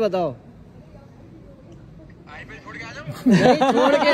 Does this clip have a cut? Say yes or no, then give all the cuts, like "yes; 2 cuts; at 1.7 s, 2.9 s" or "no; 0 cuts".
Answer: no; 0 cuts